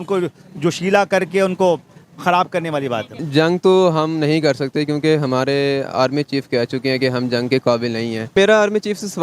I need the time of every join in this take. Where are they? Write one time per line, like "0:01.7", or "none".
0:03.2
0:08.3